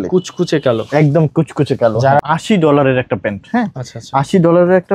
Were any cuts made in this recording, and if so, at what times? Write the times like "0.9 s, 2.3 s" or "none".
2.2 s